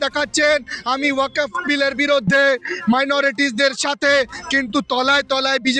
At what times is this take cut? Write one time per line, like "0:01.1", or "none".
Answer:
none